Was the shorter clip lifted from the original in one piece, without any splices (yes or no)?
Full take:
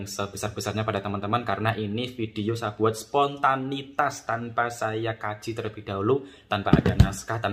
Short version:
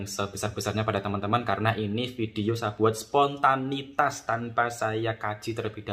yes